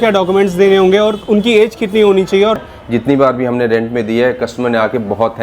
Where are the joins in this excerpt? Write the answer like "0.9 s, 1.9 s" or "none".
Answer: 2.7 s